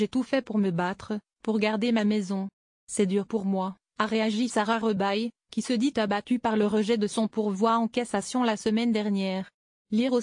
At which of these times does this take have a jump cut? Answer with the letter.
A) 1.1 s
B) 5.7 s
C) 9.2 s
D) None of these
C